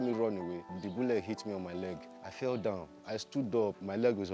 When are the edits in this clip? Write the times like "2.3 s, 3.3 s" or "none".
none